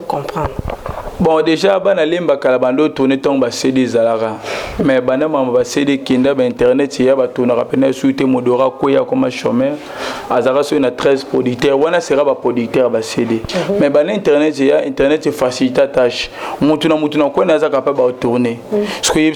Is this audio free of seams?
yes; 0 cuts

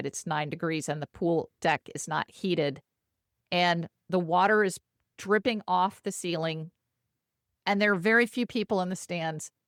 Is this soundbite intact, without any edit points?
yes; 0 cuts

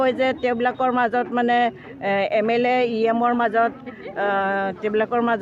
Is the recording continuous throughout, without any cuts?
yes; 0 cuts

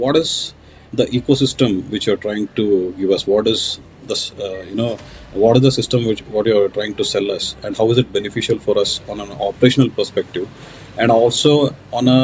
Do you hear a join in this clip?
no; 0 cuts

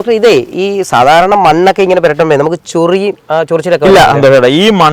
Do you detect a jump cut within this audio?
no; 0 cuts

